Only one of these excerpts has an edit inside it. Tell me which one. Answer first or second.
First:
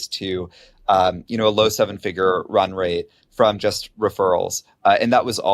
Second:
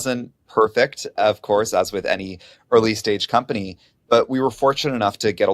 second